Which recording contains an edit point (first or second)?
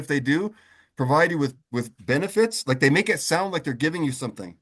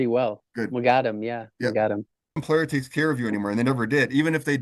second